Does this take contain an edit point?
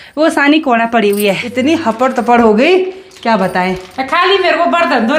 yes; 1 cut; at 1.4 s

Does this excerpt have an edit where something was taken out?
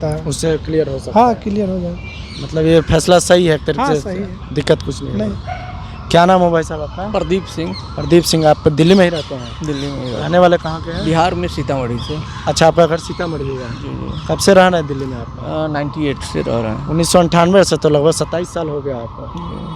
no; 0 cuts

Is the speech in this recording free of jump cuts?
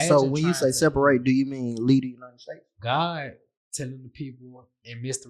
no; 1 cut; at 2.7 s

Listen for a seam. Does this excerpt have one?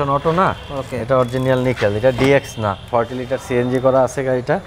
yes; 1 cut; at 2.9 s

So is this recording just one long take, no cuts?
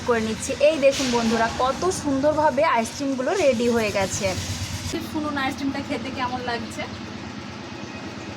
no; 1 cut; at 5.0 s

